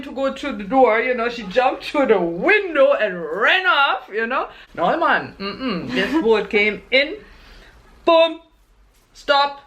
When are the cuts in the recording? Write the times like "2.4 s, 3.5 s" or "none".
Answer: 4.6 s